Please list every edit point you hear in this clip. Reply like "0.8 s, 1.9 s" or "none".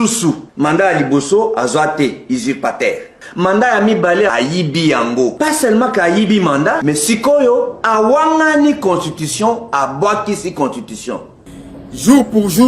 11.4 s

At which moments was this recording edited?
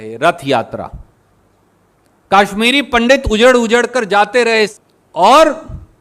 4.8 s

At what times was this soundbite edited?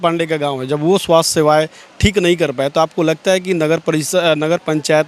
none

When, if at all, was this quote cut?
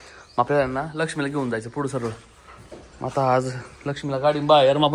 none

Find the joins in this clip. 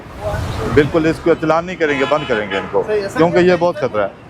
none

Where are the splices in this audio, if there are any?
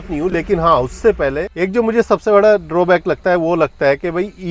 1.5 s

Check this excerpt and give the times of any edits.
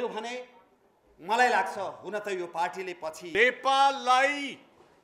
3.3 s

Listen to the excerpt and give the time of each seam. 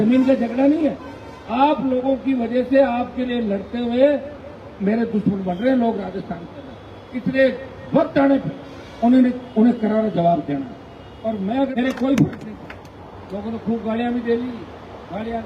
11.7 s

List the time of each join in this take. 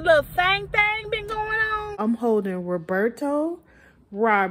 2.0 s

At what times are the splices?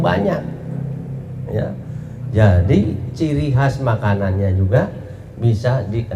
none

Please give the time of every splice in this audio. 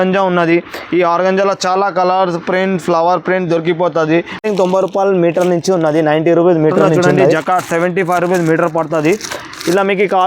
4.4 s, 7.2 s

